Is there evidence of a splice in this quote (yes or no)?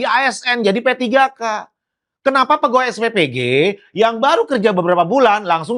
no